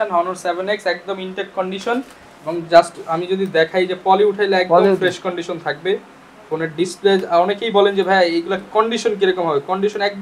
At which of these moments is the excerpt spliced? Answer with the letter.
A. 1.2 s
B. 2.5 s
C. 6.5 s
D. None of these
D